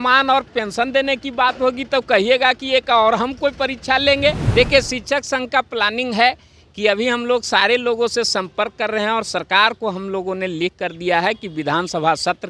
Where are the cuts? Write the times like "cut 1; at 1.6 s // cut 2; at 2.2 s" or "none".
cut 1; at 4.4 s